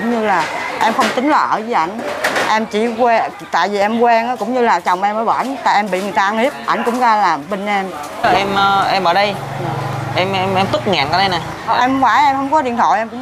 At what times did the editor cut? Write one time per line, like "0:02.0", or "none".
0:08.2